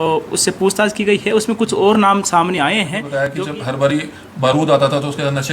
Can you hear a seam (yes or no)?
yes